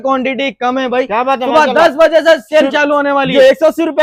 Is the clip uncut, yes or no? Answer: yes